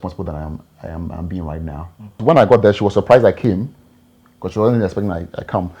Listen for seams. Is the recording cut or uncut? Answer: cut